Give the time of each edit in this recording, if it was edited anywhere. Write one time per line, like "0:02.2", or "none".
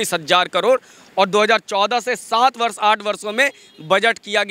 none